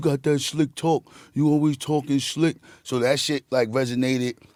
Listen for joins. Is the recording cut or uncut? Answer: uncut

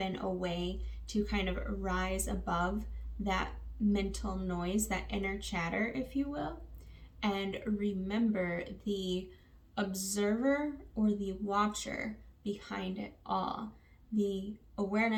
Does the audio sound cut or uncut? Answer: uncut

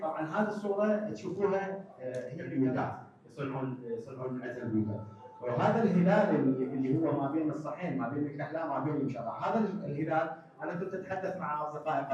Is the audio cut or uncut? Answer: cut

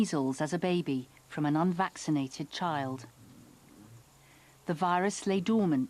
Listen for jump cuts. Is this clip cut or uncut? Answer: uncut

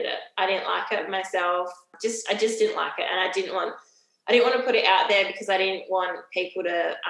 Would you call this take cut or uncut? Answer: cut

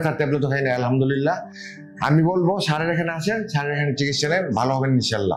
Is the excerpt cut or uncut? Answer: uncut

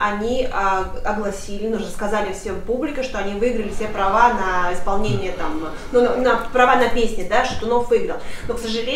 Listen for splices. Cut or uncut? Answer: uncut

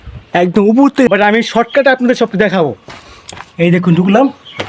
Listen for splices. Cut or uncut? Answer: cut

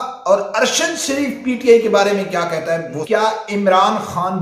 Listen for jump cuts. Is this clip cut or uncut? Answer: cut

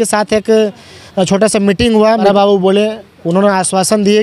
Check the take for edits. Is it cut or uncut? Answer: cut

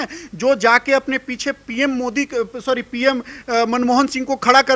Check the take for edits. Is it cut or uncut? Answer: uncut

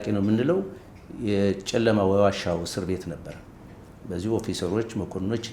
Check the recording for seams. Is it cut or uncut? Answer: uncut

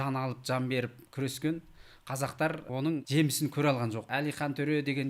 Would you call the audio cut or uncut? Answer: cut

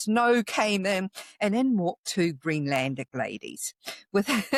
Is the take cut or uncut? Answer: uncut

